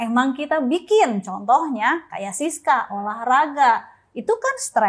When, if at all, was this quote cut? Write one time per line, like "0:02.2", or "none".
none